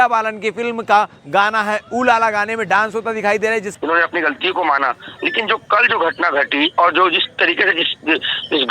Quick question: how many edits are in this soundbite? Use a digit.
1